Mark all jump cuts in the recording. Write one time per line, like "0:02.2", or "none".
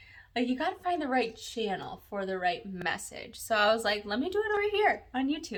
none

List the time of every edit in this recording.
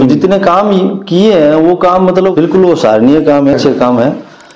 0:03.5

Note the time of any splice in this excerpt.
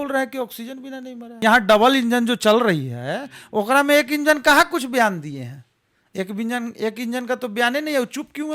0:01.4

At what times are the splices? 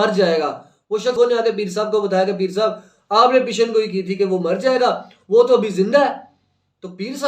0:01.2

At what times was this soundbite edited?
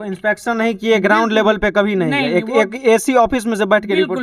none

